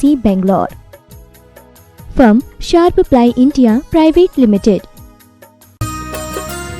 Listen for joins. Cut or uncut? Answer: cut